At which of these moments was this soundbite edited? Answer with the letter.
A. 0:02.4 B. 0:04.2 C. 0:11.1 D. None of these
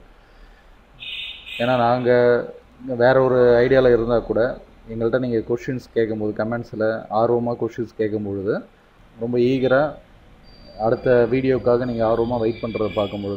C